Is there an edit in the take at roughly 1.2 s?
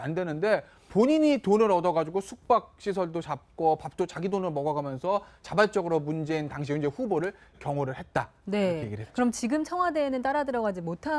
yes; 1 cut; at 1.2 s

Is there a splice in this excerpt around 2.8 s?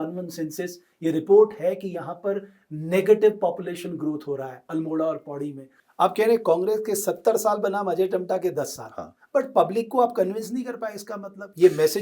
no; 1 cut; at 5.8 s

